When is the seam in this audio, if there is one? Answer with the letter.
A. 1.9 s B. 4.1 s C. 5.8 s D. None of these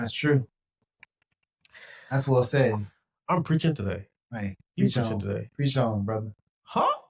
D